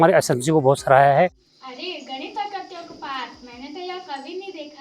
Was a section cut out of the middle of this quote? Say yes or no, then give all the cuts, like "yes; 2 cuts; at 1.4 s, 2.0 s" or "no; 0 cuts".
yes; 1 cut; at 1.4 s